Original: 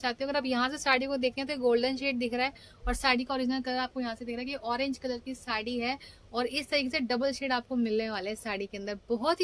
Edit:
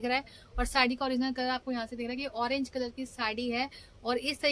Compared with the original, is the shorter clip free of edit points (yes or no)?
yes